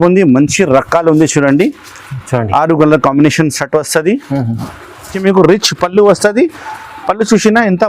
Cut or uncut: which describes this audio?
cut